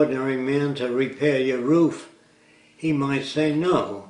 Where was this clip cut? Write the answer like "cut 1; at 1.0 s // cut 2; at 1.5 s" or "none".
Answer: cut 1; at 2.1 s

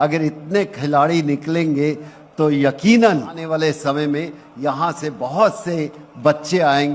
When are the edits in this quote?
cut 1; at 3.4 s

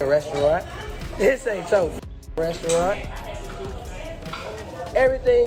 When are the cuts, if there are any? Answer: none

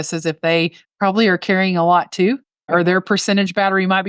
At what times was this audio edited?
cut 1; at 2.7 s

